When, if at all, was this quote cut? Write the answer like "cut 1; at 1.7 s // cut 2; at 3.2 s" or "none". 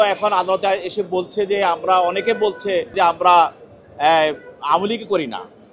cut 1; at 2.9 s